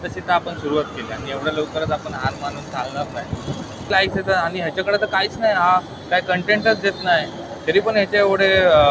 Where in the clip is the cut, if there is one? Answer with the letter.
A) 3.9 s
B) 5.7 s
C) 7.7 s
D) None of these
A